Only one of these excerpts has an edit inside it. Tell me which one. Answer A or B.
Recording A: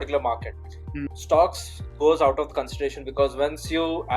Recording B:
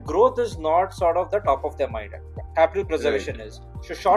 A